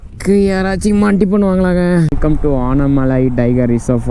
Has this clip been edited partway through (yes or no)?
yes